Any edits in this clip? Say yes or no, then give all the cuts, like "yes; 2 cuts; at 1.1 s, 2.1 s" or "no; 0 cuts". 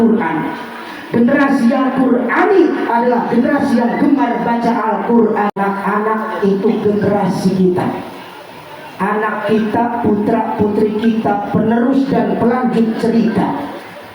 yes; 1 cut; at 5.5 s